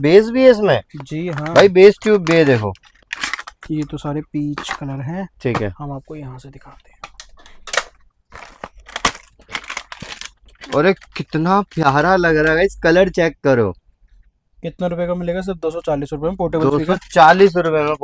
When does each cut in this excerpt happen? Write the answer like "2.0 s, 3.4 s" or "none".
none